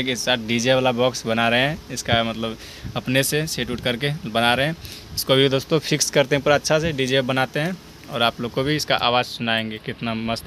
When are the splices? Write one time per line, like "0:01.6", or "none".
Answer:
none